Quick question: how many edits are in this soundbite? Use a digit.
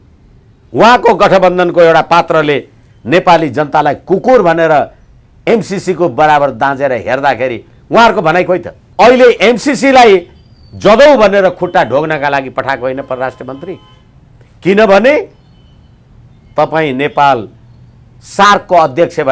1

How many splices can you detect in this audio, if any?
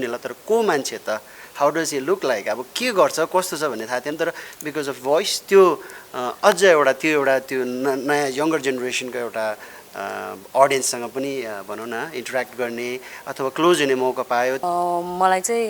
1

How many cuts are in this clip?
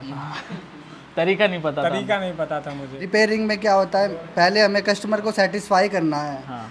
1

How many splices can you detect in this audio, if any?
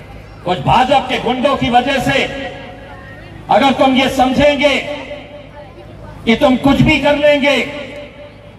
0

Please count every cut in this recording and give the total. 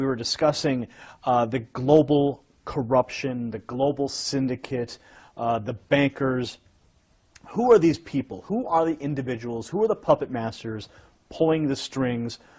1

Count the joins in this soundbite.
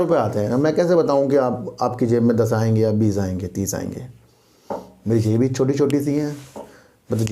0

